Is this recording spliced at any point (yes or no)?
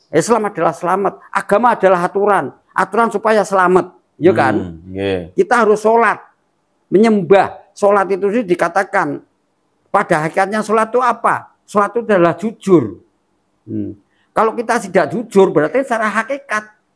no